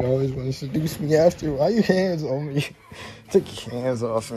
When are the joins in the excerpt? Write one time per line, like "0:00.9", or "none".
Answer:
none